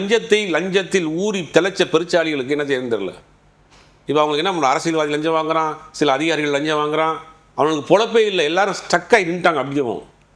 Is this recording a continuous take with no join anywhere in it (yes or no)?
yes